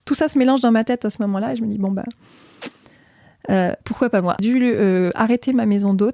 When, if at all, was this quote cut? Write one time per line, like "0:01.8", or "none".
0:04.4